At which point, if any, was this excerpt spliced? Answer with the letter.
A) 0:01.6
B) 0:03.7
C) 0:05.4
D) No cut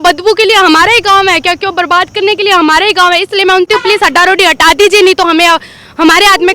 B